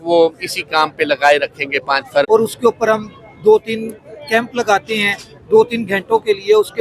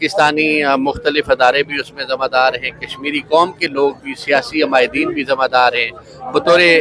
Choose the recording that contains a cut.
first; 1 cut; at 2.3 s

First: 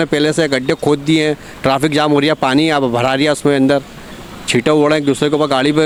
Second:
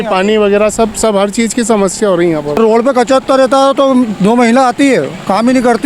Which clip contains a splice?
second; 1 cut; at 2.6 s

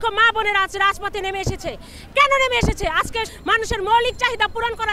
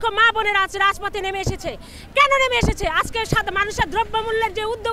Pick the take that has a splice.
first; 1 cut; at 3.3 s

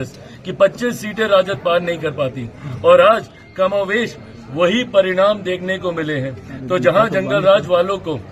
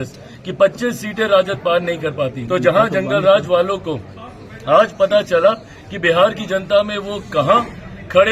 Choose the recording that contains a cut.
second; 1 cut; at 2.4 s

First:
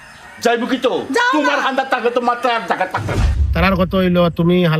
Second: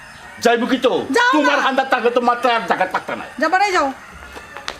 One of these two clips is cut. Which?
first; 1 cut; at 3.2 s

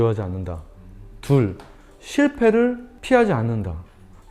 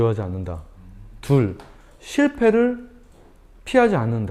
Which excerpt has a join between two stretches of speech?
first; 1 cut; at 2.9 s

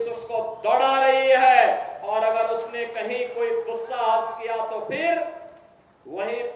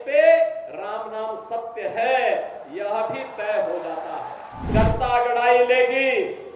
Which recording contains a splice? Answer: second; 1 cut; at 4.7 s

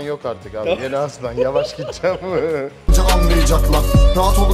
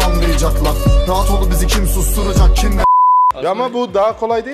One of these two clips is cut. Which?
second; 1 cut; at 3.4 s

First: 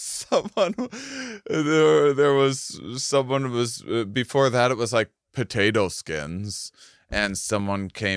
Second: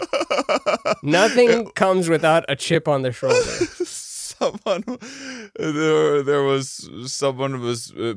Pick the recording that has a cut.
second; 1 cut; at 2.8 s

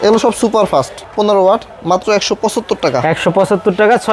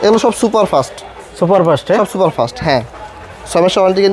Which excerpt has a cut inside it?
first; 1 cut; at 1.0 s

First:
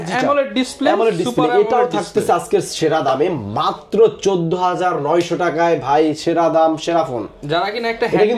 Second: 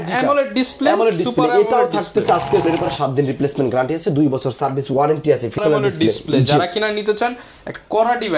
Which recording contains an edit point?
second; 2 cuts; at 2.6 s, 5.6 s

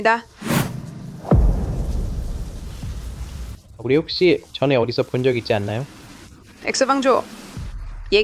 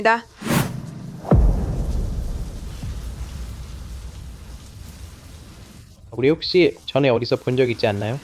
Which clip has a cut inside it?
first; 1 cut; at 3.6 s

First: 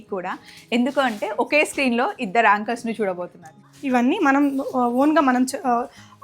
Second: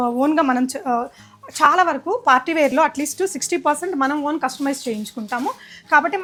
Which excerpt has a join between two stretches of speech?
first; 1 cut; at 3.7 s

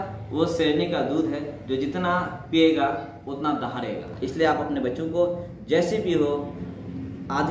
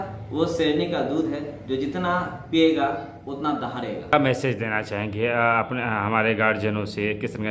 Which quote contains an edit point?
first; 1 cut; at 4.0 s

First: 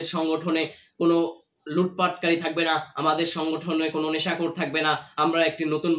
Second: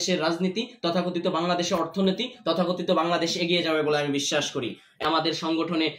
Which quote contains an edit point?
second; 1 cut; at 5.0 s

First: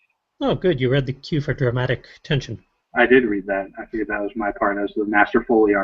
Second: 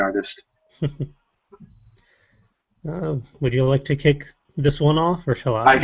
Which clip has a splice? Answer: first; 1 cut; at 2.9 s

